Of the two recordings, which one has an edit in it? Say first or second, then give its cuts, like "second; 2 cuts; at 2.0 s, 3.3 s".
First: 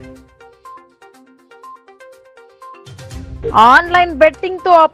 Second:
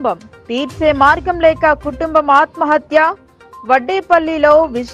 first; 3 cuts; at 1.2 s, 2.0 s, 3.3 s